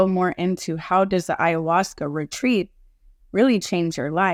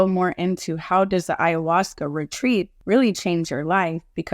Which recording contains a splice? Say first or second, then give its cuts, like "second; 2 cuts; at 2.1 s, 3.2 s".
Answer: second; 1 cut; at 2.8 s